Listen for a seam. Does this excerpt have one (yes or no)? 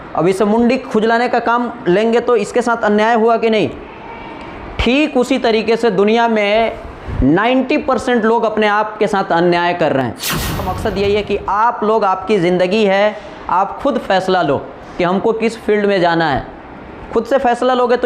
yes